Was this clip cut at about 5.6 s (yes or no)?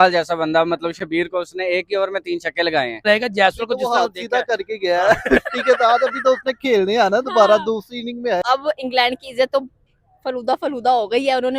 no